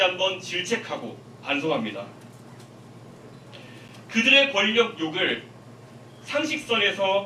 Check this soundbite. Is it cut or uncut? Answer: uncut